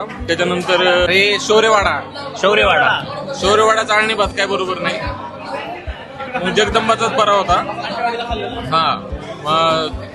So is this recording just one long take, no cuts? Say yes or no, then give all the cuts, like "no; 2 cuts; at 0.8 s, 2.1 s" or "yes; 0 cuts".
no; 1 cut; at 1.1 s